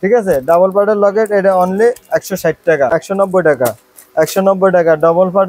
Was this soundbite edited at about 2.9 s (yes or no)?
yes